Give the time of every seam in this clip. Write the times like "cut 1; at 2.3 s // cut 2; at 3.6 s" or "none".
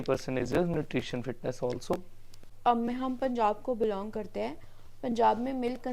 cut 1; at 2.4 s